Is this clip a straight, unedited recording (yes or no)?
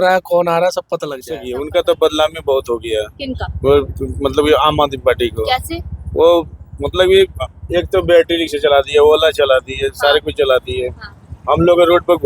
no